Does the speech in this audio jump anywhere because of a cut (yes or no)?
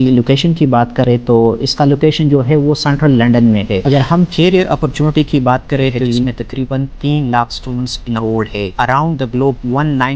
yes